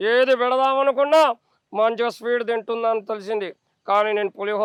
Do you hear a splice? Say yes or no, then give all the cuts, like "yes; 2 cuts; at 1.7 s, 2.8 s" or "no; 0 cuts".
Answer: no; 0 cuts